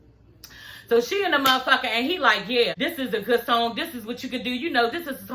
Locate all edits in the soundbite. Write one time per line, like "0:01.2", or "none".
0:02.7